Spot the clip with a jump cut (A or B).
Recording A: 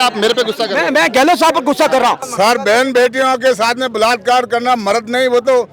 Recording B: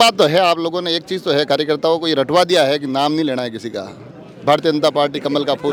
A